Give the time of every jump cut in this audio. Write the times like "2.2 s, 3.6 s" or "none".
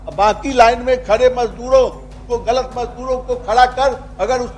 none